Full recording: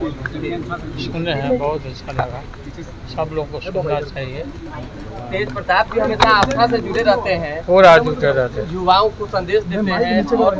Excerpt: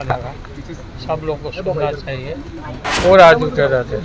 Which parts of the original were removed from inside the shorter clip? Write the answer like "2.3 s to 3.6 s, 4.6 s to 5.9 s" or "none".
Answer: 5.0 s to 7.5 s